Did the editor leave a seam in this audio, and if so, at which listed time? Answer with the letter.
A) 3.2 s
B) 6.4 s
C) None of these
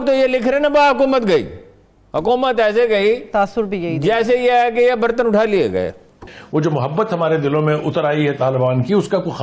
B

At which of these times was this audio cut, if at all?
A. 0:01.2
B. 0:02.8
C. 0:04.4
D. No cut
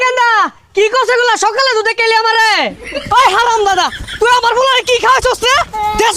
B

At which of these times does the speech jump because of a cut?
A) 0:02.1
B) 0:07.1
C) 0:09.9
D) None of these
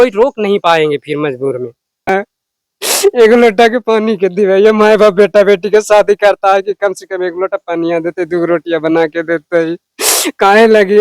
A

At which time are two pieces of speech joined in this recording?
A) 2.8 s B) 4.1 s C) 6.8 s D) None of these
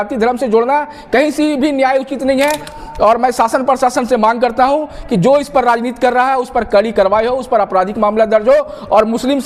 A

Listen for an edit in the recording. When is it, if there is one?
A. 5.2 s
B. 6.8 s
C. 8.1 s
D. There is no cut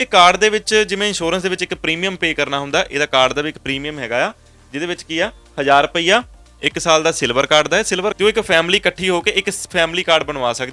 C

